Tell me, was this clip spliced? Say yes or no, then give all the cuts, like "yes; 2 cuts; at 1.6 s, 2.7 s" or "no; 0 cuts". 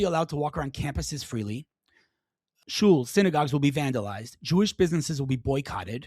yes; 1 cut; at 2.5 s